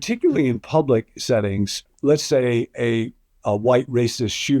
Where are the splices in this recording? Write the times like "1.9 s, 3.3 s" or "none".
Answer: 1.9 s